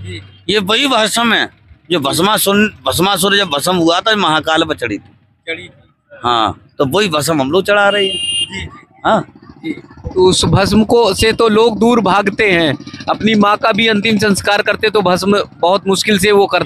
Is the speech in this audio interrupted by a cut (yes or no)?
no